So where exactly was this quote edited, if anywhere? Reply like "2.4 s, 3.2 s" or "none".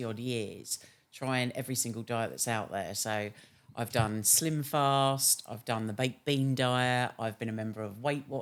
none